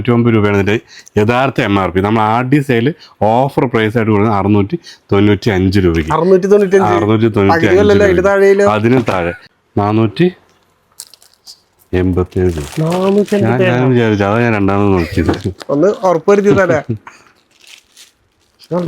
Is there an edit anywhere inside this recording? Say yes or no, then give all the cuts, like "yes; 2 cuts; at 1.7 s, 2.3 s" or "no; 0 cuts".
yes; 1 cut; at 9.4 s